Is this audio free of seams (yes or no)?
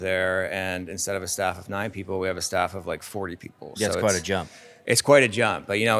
yes